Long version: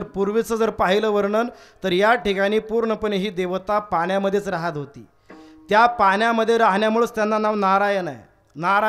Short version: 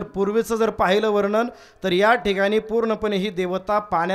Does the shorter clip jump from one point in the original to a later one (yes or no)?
no